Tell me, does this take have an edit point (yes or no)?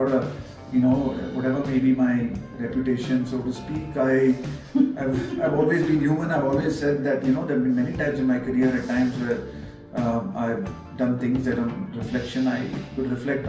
no